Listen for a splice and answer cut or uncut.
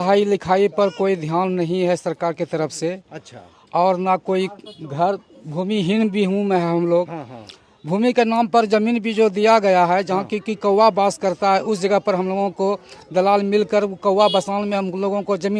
uncut